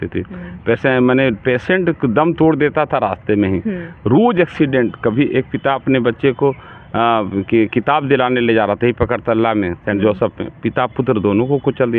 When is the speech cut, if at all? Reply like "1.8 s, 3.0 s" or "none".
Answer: none